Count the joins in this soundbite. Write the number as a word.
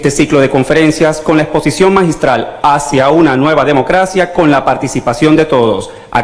one